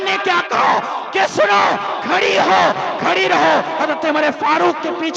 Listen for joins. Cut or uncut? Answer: uncut